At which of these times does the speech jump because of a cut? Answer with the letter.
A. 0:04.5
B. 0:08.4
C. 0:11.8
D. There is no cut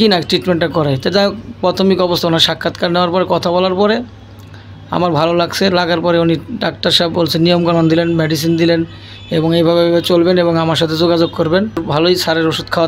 C